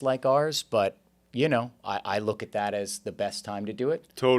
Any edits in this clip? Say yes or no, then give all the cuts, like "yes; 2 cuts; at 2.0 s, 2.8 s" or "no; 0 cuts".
no; 0 cuts